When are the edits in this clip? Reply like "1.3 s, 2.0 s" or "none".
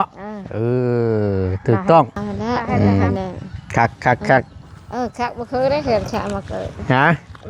2.2 s